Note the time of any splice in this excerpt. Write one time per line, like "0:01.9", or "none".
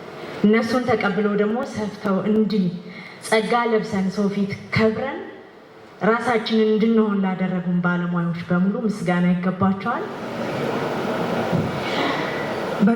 0:10.2